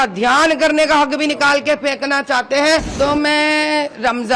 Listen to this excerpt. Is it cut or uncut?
cut